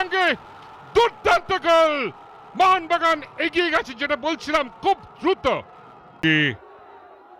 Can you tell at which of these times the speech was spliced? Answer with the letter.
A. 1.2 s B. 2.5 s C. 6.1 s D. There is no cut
C